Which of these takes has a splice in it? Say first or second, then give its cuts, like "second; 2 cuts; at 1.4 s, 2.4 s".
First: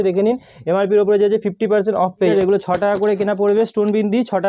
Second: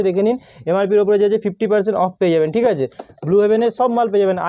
first; 1 cut; at 2.3 s